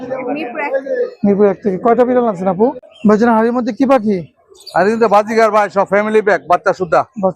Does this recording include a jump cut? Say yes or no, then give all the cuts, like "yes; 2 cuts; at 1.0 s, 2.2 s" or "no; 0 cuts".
yes; 1 cut; at 2.9 s